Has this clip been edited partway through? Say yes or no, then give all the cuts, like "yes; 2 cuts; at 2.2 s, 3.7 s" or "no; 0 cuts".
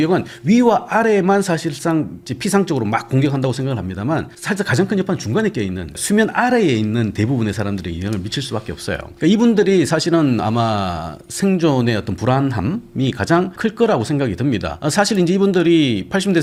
no; 0 cuts